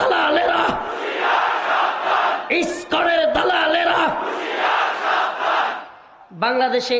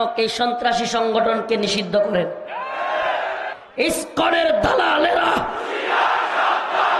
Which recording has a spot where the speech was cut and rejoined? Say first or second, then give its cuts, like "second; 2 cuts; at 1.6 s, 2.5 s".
second; 1 cut; at 3.6 s